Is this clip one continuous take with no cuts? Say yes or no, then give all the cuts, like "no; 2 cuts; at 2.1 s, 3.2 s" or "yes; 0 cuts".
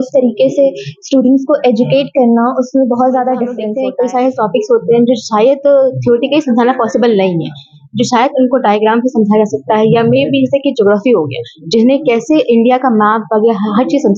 no; 1 cut; at 3.6 s